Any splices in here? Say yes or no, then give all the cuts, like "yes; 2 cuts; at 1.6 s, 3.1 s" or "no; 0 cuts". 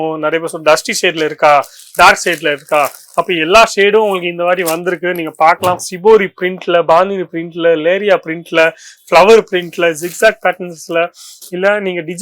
yes; 1 cut; at 5.9 s